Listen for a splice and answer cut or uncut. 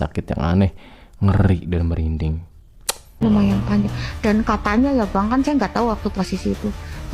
cut